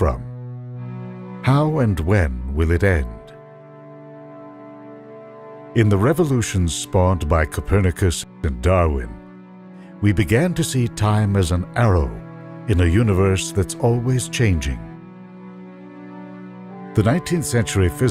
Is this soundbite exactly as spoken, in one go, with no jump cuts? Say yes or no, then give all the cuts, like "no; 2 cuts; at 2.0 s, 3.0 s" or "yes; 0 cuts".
no; 1 cut; at 2.9 s